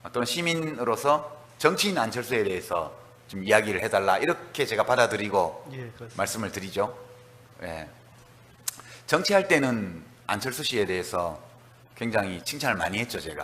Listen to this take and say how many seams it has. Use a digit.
1